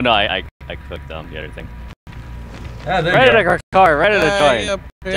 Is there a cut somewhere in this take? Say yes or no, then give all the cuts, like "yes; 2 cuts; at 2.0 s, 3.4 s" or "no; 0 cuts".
yes; 1 cut; at 2.3 s